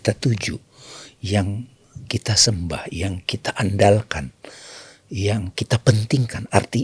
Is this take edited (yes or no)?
no